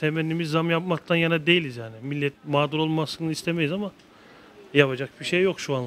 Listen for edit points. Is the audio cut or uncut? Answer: uncut